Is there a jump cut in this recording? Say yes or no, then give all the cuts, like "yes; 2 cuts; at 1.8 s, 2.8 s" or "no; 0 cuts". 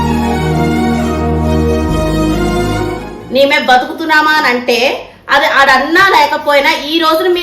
yes; 1 cut; at 3.1 s